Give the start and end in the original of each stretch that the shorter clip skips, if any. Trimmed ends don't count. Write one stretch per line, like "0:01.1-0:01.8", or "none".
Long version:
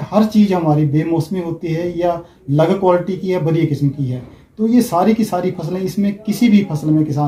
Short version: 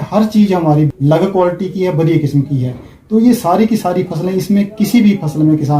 0:00.9-0:02.4